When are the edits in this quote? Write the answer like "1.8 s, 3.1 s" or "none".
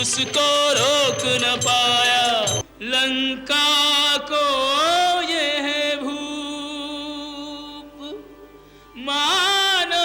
2.6 s